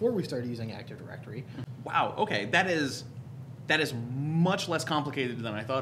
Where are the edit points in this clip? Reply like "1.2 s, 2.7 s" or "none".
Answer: 1.6 s